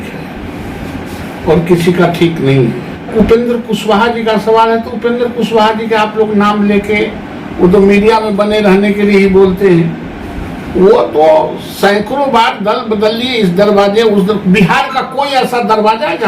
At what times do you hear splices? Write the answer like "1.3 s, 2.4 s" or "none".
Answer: 3.1 s